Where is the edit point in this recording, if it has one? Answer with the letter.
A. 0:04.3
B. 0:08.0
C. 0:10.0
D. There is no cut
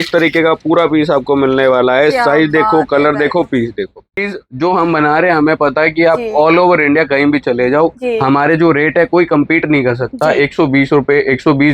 A